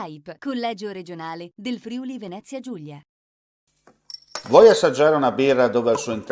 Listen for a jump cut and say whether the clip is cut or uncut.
cut